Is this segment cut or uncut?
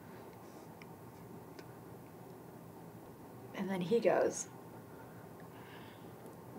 cut